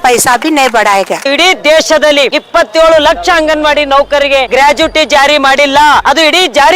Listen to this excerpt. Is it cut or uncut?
cut